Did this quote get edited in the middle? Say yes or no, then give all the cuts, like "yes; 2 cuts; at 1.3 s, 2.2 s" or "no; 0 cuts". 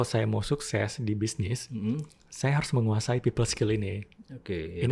no; 0 cuts